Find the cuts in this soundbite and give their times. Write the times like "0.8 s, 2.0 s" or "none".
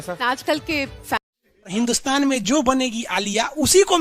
1.6 s